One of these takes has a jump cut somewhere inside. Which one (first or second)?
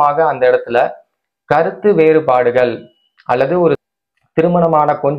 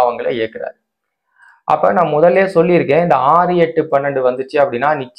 first